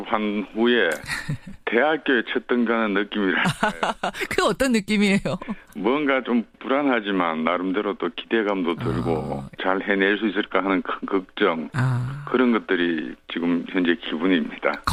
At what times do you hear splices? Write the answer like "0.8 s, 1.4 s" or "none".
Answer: none